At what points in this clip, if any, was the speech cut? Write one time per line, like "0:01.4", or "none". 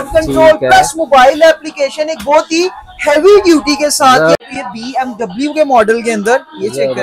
0:04.4